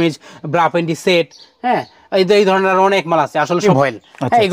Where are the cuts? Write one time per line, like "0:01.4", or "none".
0:03.6